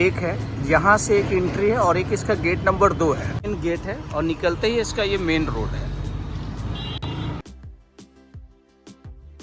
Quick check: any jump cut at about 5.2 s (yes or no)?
no